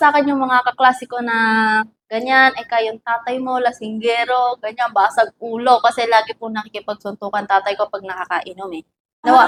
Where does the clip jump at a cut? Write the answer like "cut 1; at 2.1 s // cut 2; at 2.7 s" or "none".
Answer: none